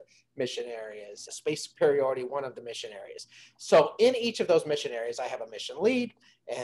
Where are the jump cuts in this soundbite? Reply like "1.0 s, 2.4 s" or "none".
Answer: 1.3 s